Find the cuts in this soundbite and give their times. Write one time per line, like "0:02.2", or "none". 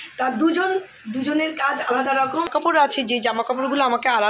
0:02.5